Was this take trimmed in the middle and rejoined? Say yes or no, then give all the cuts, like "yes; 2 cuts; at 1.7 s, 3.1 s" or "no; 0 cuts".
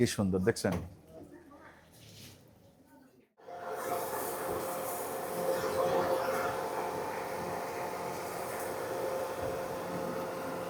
no; 0 cuts